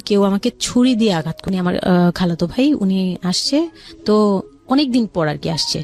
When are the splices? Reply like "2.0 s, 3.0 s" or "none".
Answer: 1.4 s